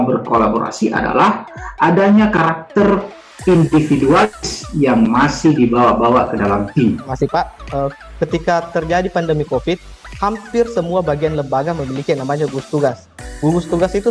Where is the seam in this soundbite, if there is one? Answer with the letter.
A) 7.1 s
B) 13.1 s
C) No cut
A